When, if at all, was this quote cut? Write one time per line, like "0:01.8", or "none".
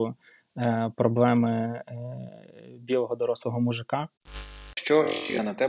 0:04.6